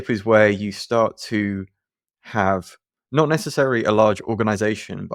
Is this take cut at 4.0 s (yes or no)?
no